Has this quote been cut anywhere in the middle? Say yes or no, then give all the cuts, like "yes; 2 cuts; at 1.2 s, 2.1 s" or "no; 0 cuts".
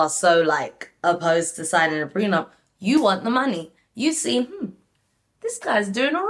no; 0 cuts